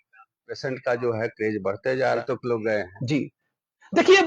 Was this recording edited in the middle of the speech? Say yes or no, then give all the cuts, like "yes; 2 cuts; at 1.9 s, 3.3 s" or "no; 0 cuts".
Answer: yes; 1 cut; at 2.2 s